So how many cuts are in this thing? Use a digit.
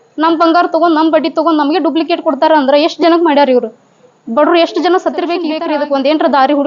1